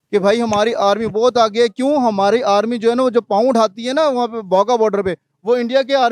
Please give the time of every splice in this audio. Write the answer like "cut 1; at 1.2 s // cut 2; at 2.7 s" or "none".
none

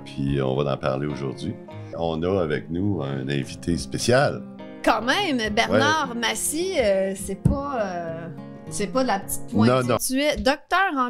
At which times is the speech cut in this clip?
cut 1; at 1.9 s // cut 2; at 10.0 s

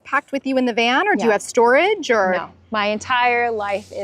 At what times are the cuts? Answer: none

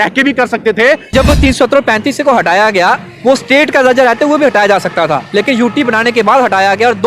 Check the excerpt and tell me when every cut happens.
cut 1; at 1.0 s

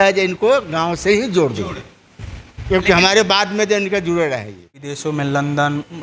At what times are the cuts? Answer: cut 1; at 4.9 s

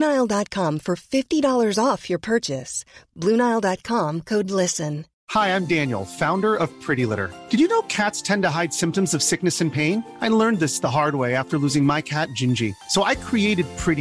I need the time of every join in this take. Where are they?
cut 1; at 5.1 s

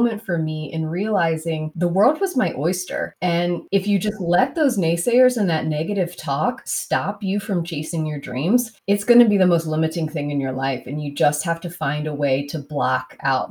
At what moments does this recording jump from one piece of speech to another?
cut 1; at 1.7 s // cut 2; at 3.5 s // cut 3; at 8.7 s

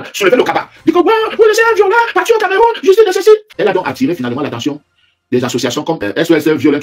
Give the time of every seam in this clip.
cut 1; at 3.5 s // cut 2; at 6.1 s

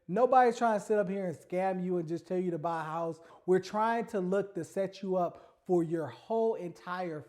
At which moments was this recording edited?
cut 1; at 3.3 s

